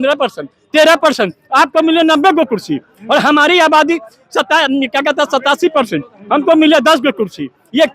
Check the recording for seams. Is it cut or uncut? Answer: uncut